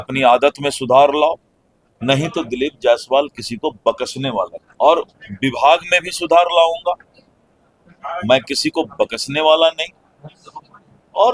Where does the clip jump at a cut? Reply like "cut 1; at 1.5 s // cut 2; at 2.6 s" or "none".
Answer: none